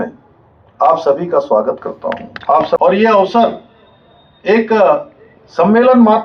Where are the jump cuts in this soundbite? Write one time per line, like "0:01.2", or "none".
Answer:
0:02.8